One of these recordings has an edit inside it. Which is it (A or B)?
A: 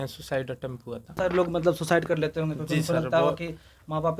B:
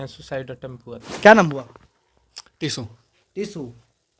B